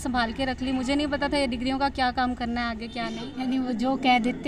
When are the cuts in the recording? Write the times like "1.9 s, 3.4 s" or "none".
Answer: 3.3 s